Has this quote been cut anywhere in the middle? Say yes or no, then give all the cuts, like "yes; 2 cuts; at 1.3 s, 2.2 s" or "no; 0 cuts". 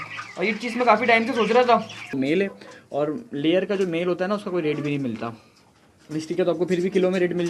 yes; 1 cut; at 2.1 s